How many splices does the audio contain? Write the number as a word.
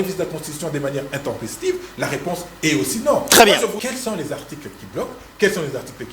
one